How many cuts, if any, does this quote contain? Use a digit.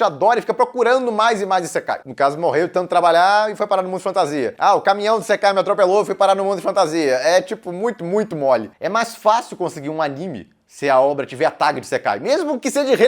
2